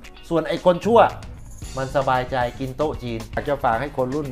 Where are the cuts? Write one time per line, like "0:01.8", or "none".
0:03.4